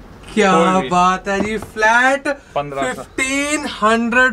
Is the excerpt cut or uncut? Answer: uncut